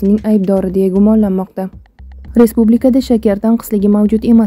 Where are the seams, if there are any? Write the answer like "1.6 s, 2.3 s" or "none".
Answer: 2.2 s